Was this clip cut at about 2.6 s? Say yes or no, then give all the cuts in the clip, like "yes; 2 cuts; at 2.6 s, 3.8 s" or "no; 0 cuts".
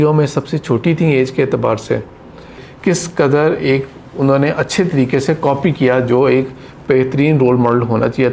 yes; 1 cut; at 2.6 s